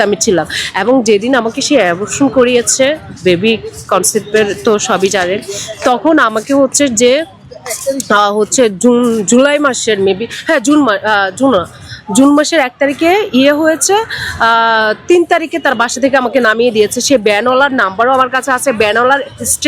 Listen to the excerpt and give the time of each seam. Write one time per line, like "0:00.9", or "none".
none